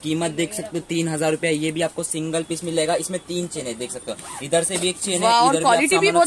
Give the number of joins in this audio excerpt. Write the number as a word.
zero